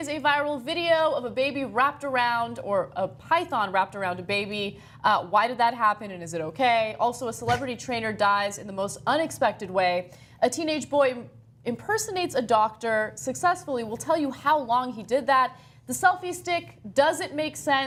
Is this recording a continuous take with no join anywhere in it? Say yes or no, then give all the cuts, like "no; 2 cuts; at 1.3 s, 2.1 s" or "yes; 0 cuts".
yes; 0 cuts